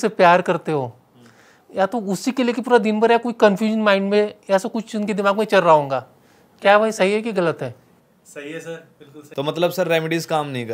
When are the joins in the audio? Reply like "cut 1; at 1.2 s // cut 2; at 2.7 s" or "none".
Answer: cut 1; at 9.3 s